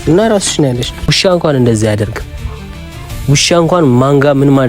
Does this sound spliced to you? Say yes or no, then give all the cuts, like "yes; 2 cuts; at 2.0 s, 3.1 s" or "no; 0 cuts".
yes; 1 cut; at 1.0 s